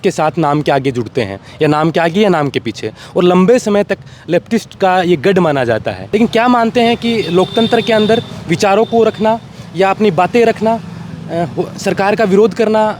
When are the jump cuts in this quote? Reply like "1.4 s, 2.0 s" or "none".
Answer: 6.0 s